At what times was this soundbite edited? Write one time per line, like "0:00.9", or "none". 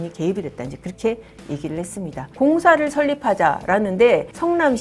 0:02.3